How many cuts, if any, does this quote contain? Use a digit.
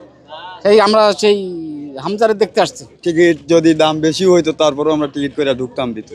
1